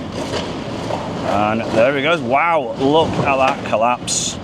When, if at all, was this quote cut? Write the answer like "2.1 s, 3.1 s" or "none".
none